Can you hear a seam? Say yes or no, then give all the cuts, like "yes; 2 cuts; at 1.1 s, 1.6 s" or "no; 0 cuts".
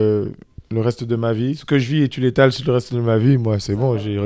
yes; 1 cut; at 1.6 s